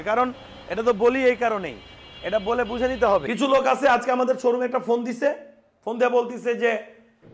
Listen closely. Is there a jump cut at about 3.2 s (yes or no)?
yes